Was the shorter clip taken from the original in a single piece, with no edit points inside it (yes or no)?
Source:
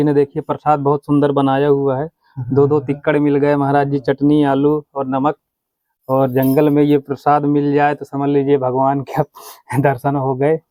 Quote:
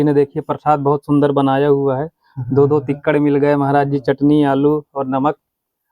yes